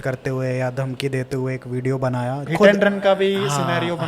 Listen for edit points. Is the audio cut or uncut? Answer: cut